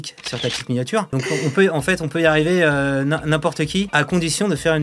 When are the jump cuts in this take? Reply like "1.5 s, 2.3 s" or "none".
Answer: 1.1 s, 3.9 s